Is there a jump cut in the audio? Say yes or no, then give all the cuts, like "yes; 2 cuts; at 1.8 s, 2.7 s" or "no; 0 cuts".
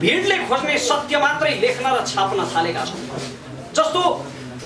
no; 0 cuts